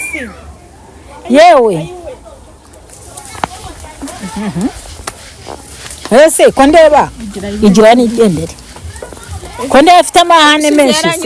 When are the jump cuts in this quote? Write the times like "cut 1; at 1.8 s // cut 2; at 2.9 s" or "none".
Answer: none